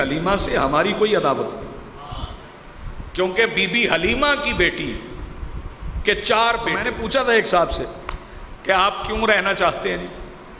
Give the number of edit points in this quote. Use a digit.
1